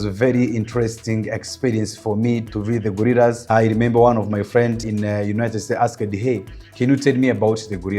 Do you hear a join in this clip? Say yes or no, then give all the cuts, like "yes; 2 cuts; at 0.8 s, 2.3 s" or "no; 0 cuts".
yes; 3 cuts; at 2.5 s, 3.4 s, 4.8 s